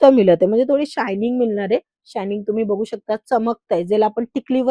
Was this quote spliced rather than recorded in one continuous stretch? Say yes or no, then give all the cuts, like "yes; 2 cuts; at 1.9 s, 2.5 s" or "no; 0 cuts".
no; 0 cuts